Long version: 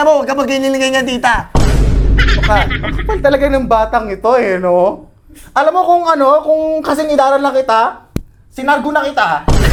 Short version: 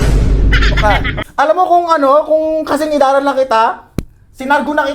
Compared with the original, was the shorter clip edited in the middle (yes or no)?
yes